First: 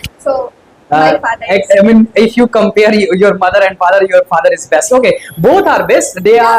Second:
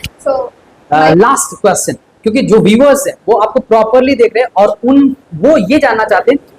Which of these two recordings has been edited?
second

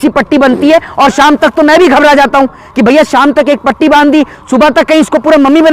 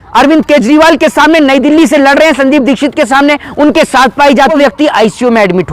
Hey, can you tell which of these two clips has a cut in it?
second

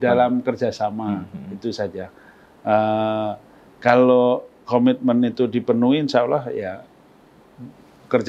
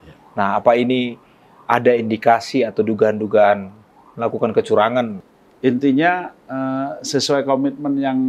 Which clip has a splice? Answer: second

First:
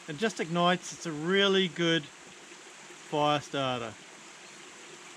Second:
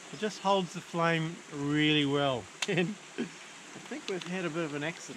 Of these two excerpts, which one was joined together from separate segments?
second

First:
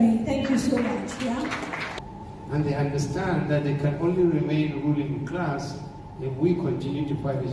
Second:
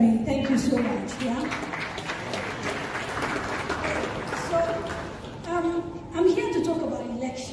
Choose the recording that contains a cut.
first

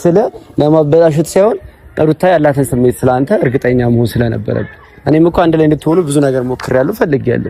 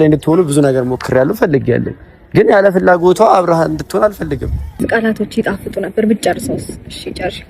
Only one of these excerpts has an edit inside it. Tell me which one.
second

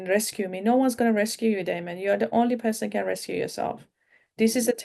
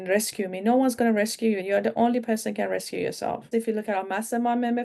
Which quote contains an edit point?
second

